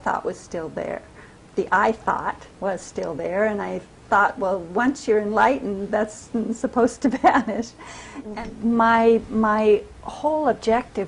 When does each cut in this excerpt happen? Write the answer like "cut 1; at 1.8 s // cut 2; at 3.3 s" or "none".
cut 1; at 8.3 s